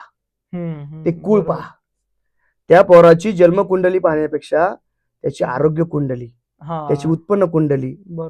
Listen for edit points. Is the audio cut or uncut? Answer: uncut